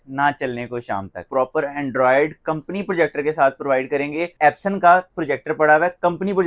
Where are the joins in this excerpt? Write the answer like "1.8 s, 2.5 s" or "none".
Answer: 1.2 s, 4.3 s